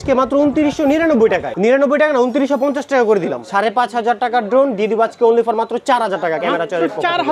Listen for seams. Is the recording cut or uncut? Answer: cut